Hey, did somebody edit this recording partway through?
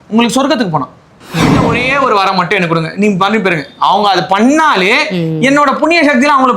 yes; 1 cut; at 1.7 s

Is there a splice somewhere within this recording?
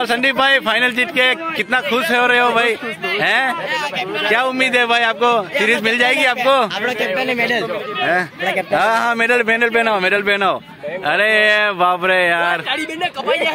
no; 0 cuts

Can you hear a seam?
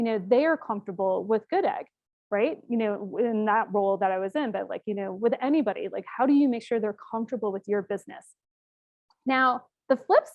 no; 0 cuts

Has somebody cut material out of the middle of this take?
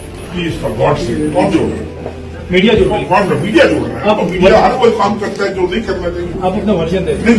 no; 0 cuts

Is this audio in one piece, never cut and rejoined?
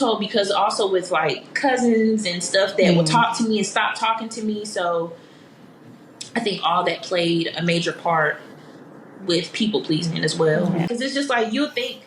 no; 1 cut; at 10.9 s

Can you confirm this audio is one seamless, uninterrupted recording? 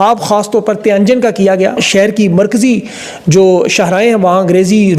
no; 1 cut; at 1.8 s

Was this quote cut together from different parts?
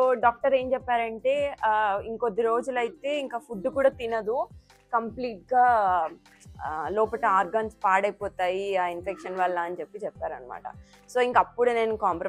no; 0 cuts

